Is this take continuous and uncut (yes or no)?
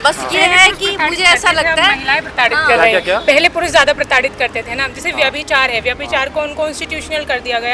yes